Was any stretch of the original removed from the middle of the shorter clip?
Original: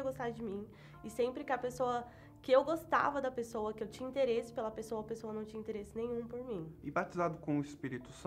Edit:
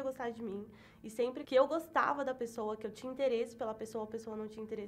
yes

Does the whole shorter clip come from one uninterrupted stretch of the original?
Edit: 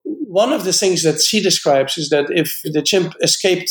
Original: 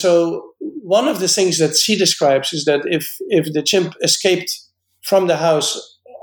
no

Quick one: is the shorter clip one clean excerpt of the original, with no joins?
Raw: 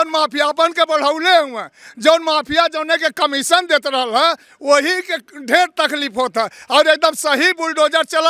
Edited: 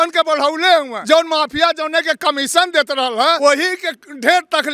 no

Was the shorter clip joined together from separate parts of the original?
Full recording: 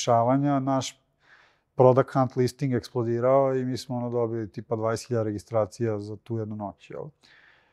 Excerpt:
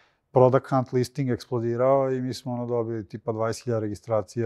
no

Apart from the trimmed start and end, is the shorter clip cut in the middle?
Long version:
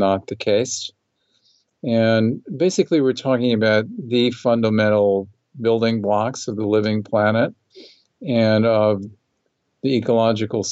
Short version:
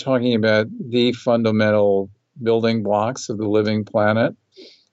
no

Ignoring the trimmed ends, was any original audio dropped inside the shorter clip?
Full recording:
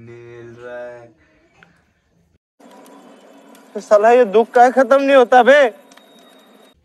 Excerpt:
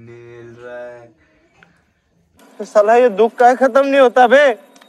yes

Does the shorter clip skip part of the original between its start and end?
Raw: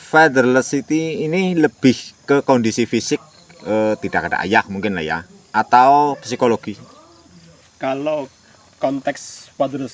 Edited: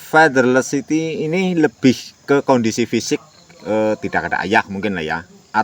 no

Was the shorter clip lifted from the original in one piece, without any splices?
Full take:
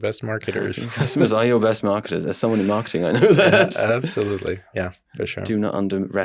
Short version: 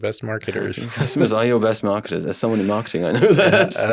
yes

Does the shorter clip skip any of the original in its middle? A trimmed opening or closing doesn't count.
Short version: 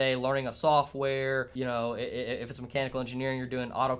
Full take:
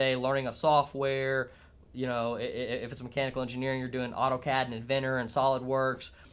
yes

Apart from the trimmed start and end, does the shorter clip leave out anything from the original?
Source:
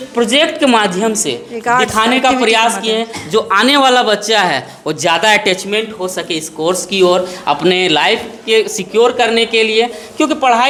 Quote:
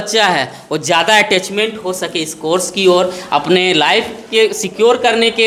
no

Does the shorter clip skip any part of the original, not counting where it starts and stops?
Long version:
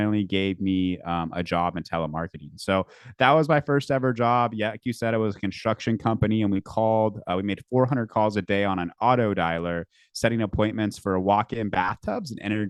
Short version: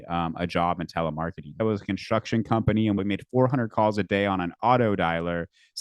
yes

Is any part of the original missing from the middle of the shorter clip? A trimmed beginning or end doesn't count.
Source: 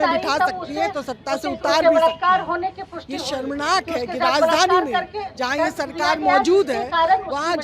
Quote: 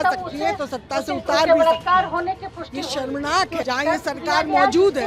yes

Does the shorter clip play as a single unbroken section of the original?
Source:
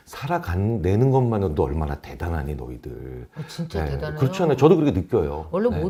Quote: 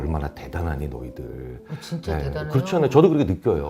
yes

